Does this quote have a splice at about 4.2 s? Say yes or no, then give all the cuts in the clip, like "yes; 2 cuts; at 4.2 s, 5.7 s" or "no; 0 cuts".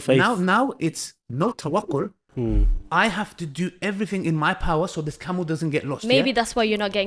no; 0 cuts